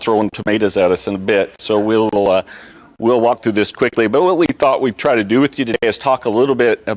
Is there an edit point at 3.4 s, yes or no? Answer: yes